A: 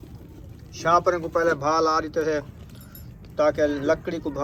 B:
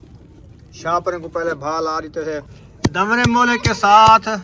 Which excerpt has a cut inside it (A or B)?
B